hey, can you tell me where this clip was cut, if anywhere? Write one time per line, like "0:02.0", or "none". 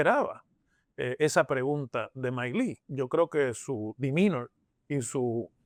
none

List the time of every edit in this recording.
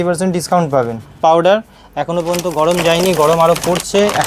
0:01.2

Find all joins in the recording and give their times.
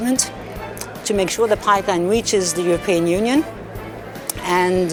none

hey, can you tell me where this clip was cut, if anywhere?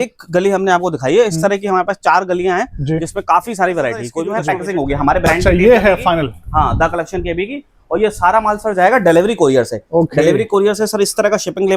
0:04.3

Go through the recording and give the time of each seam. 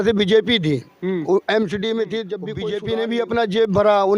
0:02.7

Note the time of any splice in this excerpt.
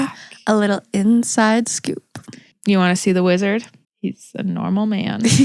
none

